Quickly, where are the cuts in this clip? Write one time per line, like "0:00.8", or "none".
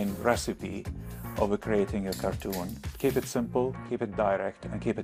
none